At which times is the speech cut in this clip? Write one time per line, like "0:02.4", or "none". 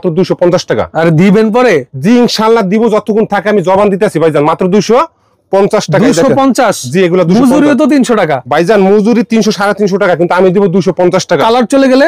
none